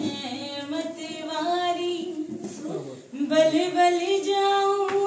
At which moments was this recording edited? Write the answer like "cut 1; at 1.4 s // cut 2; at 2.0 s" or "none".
none